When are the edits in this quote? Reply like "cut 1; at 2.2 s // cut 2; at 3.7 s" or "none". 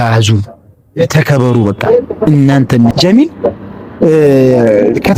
cut 1; at 2.9 s